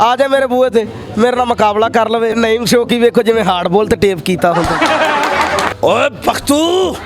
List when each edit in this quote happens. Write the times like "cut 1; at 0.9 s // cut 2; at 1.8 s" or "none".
cut 1; at 2.3 s // cut 2; at 5.7 s